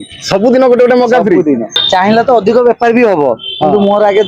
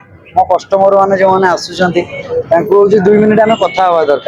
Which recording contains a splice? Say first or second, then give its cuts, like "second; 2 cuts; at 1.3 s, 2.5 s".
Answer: first; 1 cut; at 1.8 s